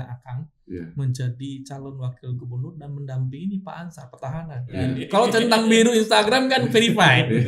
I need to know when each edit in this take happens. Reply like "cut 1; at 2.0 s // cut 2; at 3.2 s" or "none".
cut 1; at 5.0 s